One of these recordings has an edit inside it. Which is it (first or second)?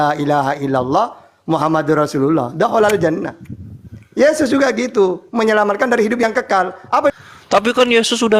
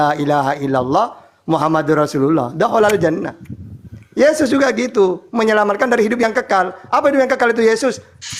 first